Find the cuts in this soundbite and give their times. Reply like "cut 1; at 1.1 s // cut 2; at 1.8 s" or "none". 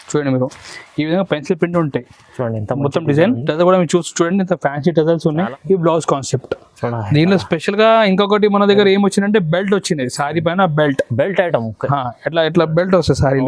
cut 1; at 5.6 s